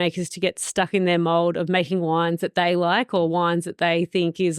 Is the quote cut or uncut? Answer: uncut